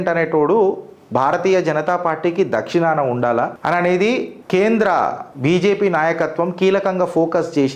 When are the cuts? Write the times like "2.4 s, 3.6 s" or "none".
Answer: 3.6 s, 4.4 s, 5.3 s